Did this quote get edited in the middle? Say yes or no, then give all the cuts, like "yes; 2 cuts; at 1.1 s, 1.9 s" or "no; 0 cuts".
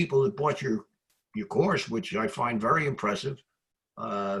no; 0 cuts